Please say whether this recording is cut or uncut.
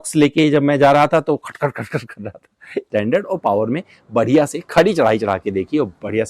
cut